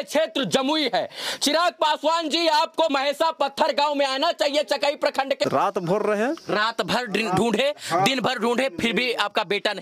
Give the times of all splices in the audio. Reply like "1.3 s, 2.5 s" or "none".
2.9 s, 5.4 s